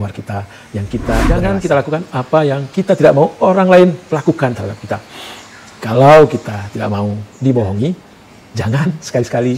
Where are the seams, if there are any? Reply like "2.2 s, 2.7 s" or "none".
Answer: 1.3 s